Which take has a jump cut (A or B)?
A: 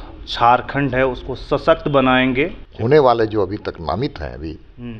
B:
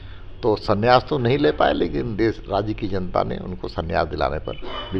A